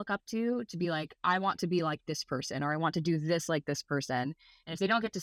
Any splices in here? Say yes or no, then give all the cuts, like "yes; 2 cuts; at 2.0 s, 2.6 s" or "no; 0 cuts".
no; 0 cuts